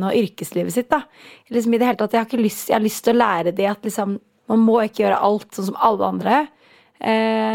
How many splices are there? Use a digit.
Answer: 1